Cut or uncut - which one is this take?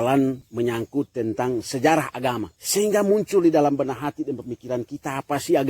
cut